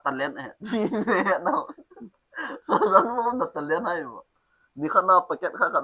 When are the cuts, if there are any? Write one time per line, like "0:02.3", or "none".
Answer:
none